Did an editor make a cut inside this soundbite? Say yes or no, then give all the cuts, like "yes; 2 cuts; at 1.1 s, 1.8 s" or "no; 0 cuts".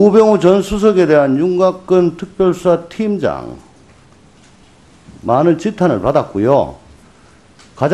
no; 0 cuts